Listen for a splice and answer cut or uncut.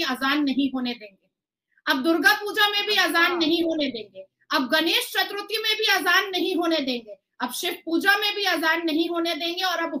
uncut